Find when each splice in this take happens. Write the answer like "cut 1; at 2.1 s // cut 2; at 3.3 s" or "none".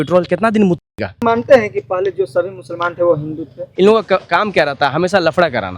cut 1; at 1.2 s // cut 2; at 3.6 s